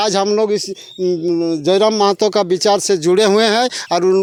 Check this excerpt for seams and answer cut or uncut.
uncut